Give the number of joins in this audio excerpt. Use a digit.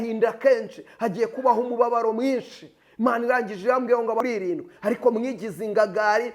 1